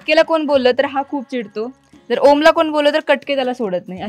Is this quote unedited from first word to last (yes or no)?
yes